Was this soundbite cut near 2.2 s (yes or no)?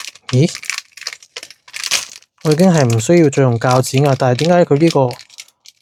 no